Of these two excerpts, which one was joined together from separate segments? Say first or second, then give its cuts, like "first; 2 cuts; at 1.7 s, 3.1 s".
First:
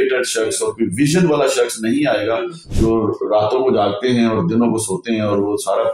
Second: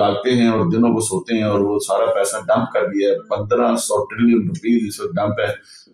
first; 1 cut; at 2.6 s